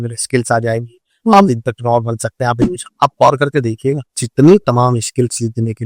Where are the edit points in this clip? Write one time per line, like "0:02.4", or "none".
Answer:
0:04.1